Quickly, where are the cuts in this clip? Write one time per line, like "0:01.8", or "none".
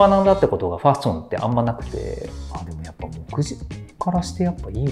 0:02.3